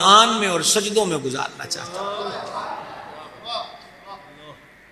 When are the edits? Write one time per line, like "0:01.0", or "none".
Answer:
none